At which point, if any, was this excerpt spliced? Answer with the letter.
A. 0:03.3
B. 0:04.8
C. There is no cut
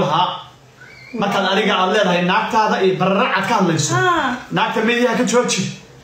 C